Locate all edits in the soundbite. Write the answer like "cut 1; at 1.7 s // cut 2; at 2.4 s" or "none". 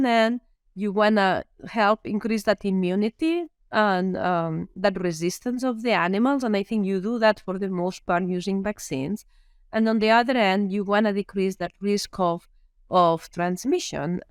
none